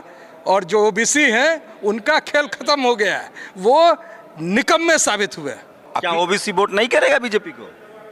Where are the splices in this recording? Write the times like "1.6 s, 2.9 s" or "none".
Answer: 5.9 s